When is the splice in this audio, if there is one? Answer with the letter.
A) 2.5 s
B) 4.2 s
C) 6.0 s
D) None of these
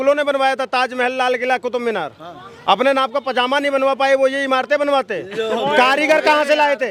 D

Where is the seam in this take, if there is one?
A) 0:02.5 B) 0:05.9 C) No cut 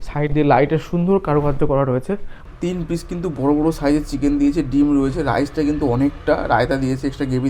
A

